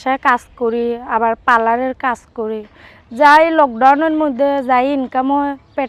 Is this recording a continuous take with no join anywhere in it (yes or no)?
yes